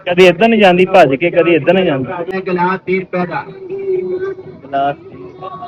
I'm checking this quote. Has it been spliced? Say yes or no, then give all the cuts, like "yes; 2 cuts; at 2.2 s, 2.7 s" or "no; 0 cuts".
yes; 1 cut; at 2.4 s